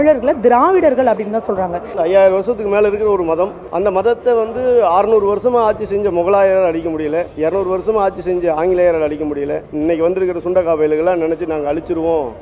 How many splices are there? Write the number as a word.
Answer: four